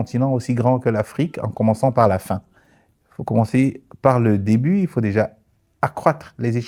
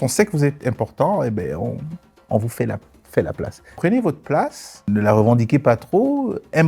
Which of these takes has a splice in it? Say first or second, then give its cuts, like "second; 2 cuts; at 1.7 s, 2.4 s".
second; 2 cuts; at 3.7 s, 4.9 s